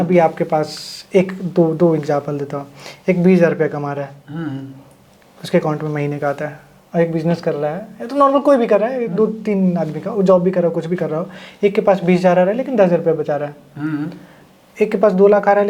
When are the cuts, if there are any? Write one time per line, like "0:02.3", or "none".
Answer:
none